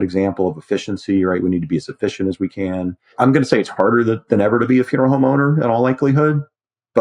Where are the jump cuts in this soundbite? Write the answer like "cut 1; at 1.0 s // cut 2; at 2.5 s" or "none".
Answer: none